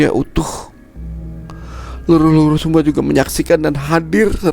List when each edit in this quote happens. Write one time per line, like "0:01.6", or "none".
0:00.8
0:01.7